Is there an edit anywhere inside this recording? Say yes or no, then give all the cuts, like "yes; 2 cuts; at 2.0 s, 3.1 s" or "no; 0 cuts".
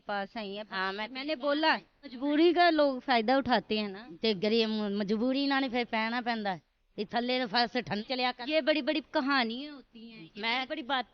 yes; 2 cuts; at 2.0 s, 8.0 s